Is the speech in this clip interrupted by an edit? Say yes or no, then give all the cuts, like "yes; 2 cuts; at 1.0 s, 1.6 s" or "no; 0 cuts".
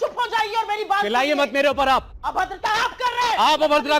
yes; 1 cut; at 2.2 s